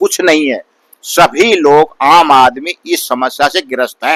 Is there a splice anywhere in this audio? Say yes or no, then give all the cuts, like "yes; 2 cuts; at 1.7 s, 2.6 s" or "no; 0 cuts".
no; 0 cuts